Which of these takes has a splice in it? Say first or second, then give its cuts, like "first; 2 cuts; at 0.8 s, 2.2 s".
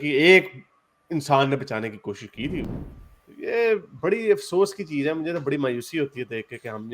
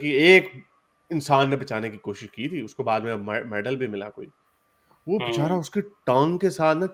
first; 1 cut; at 2.7 s